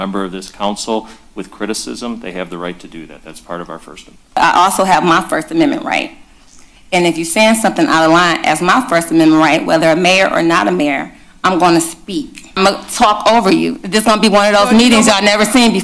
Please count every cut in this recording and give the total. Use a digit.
2